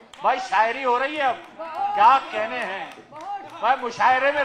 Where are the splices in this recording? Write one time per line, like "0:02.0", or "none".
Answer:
none